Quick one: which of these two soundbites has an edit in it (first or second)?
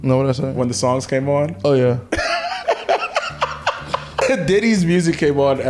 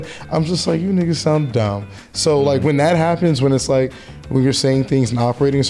first